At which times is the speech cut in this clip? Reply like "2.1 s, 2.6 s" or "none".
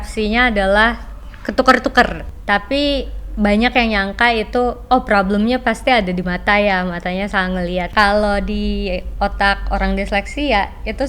2.3 s, 7.9 s